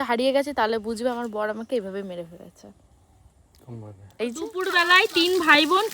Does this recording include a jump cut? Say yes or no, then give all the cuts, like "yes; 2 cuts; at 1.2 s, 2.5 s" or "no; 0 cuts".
yes; 1 cut; at 4.4 s